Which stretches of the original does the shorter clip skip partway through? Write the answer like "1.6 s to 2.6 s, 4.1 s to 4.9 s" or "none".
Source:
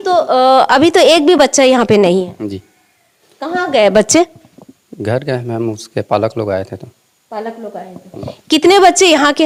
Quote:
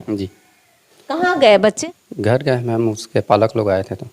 4.1 s to 4.6 s